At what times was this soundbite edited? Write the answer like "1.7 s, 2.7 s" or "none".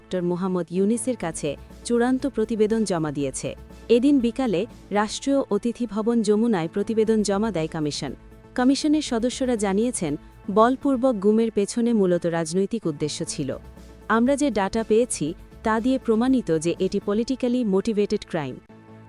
none